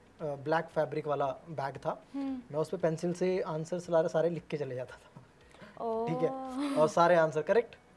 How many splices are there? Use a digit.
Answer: 0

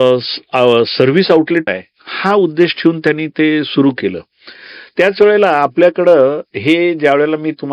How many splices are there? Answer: 1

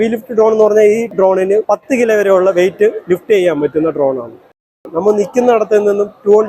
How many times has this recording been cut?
2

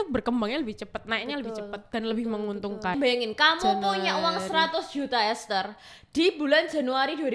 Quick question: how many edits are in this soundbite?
1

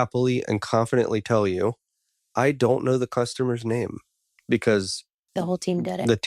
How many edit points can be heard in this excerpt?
2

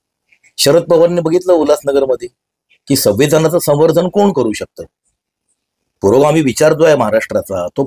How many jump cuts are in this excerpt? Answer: 0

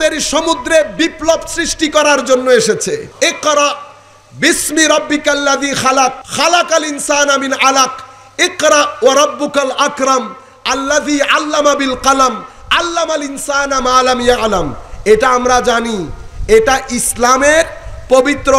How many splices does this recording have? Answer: 2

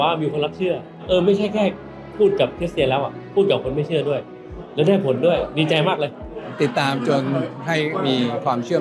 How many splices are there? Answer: 3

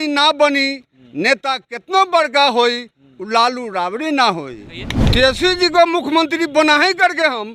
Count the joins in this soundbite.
1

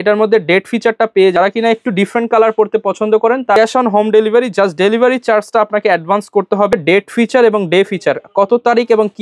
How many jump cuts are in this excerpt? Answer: 3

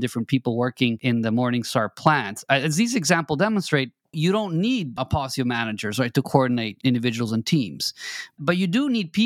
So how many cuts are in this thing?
5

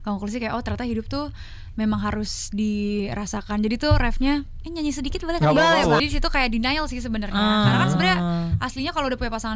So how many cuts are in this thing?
1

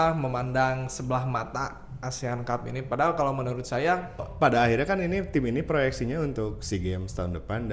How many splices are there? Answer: 1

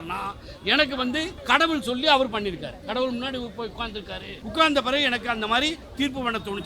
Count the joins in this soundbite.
2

